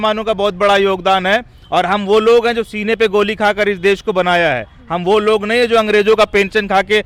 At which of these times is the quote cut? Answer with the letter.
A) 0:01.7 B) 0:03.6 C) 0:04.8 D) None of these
D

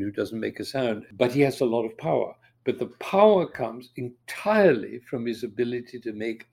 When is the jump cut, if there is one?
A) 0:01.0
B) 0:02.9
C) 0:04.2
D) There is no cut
A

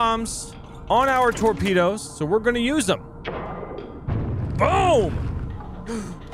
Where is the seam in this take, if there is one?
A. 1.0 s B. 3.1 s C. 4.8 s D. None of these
B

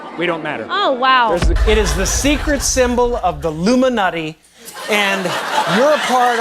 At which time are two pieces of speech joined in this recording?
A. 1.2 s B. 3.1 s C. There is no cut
A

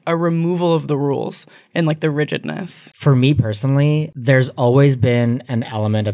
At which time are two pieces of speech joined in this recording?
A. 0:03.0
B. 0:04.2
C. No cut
A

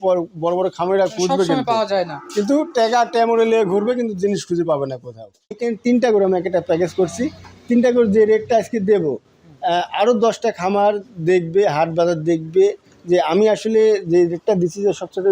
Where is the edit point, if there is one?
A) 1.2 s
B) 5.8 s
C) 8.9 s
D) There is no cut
B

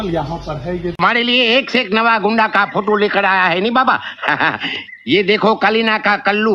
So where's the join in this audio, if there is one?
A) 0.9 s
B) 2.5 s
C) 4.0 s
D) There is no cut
A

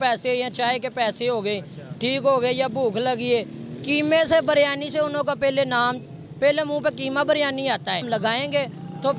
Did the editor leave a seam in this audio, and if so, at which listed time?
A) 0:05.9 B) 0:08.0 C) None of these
B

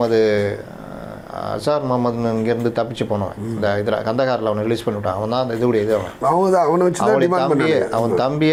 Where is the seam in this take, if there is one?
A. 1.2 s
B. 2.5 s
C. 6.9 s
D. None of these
D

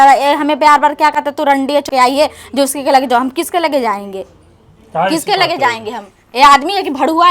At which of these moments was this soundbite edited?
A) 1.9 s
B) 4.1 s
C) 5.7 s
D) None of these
A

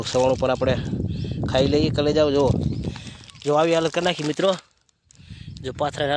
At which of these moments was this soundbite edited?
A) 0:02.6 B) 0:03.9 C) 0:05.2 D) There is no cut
D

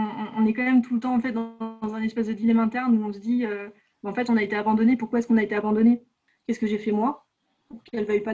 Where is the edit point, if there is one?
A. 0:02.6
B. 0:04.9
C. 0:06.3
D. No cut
C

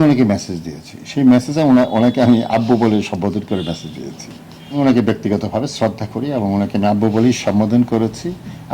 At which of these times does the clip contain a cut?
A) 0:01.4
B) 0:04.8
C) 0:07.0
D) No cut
B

